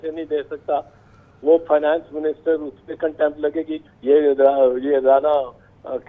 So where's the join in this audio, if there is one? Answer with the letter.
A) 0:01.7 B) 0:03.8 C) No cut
B